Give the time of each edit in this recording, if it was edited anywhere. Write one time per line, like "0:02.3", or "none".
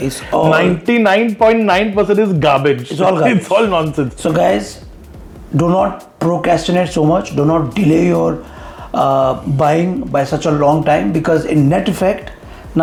none